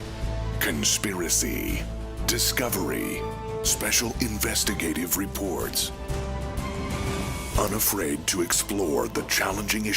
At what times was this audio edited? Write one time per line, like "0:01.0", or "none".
0:09.0